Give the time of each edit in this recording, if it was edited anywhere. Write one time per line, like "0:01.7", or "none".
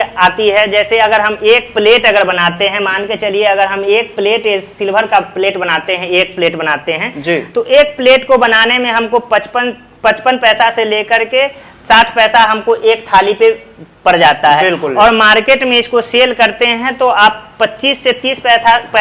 none